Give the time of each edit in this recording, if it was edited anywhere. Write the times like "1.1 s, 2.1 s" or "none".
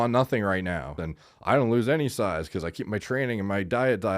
1.0 s